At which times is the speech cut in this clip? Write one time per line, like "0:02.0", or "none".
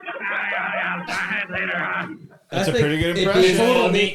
0:02.5